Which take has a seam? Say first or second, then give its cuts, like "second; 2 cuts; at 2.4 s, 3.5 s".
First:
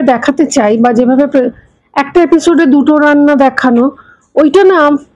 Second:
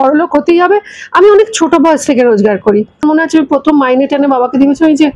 second; 1 cut; at 3.0 s